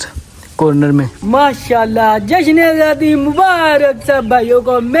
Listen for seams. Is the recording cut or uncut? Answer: cut